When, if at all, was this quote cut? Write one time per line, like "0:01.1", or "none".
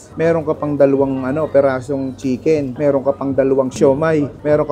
0:02.7
0:03.8